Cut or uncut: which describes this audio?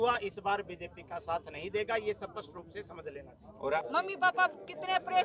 cut